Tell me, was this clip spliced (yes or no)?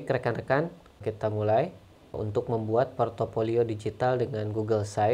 yes